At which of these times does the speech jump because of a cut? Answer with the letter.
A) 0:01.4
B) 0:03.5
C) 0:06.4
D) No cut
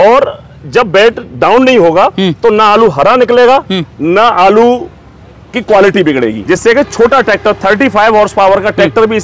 C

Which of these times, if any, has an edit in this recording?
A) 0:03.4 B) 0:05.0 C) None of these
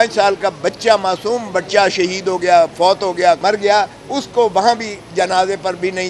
A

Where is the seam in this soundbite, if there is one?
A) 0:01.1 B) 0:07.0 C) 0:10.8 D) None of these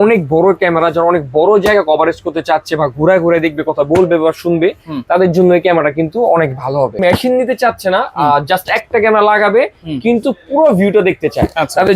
B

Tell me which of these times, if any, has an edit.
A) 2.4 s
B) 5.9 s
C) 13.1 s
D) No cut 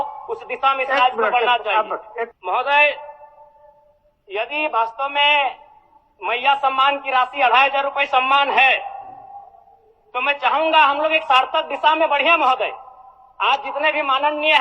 A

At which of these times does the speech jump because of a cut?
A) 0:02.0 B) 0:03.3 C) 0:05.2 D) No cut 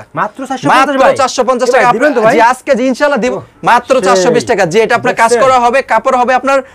B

